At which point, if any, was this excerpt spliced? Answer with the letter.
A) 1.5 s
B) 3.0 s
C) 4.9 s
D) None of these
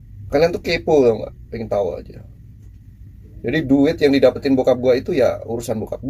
D